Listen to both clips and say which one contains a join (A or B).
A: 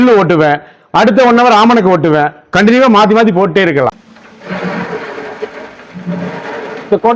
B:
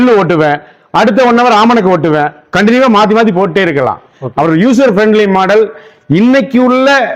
A